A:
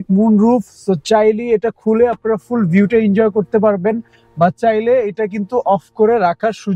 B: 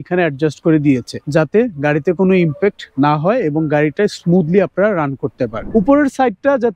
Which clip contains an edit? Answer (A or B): B